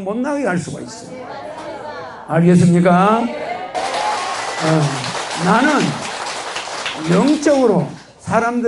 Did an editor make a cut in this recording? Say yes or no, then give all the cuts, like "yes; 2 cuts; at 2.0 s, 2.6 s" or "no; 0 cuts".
yes; 1 cut; at 3.7 s